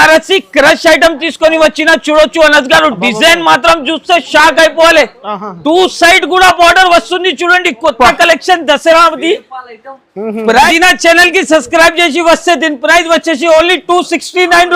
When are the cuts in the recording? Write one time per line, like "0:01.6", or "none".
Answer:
0:10.7